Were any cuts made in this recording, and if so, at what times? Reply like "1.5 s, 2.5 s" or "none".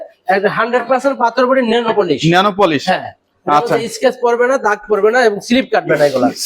none